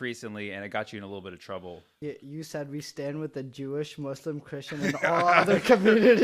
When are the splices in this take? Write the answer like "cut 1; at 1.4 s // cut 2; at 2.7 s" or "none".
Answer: cut 1; at 1.8 s